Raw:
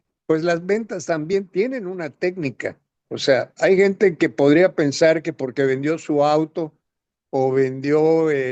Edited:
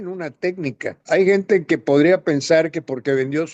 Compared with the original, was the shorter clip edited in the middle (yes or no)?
yes